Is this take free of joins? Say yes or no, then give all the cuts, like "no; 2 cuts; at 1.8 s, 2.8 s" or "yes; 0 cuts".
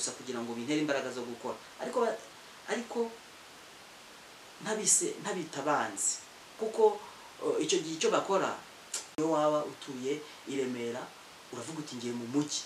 no; 1 cut; at 9.0 s